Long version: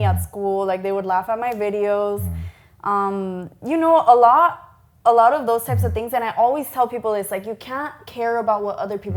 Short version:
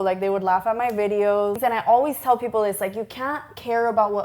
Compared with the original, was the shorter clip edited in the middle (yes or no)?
yes